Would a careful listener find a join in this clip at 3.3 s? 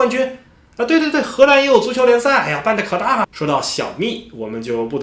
yes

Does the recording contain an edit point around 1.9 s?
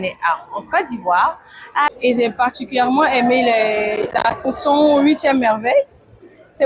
yes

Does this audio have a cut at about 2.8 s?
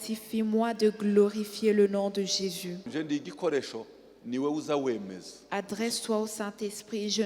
yes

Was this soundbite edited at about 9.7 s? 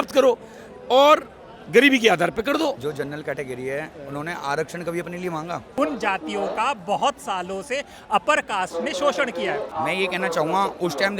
yes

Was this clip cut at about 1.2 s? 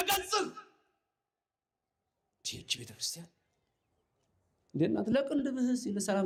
no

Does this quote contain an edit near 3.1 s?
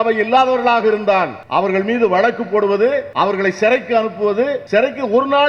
yes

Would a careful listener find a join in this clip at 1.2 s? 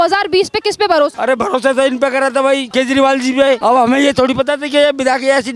yes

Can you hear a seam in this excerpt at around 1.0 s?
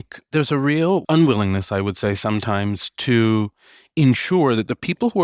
yes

